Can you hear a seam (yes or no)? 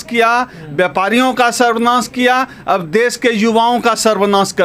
no